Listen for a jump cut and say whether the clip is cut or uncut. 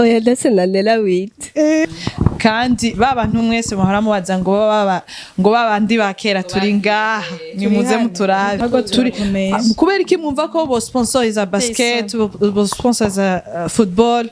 cut